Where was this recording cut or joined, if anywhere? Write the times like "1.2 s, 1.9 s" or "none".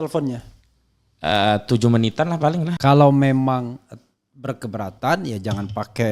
2.7 s